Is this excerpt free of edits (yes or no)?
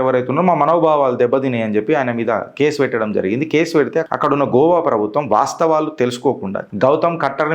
no